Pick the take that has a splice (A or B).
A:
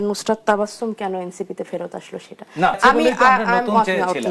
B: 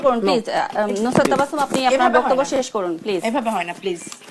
A